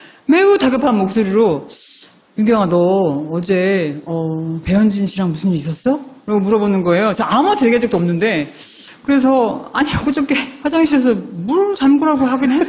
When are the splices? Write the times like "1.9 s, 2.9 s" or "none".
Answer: none